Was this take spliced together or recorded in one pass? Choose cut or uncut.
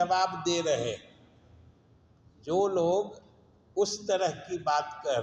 uncut